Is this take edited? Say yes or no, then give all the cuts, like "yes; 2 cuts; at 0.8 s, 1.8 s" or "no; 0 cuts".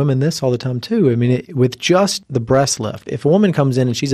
yes; 2 cuts; at 1.5 s, 2.6 s